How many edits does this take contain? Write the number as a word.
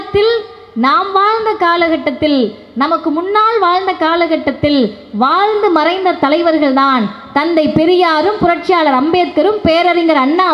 zero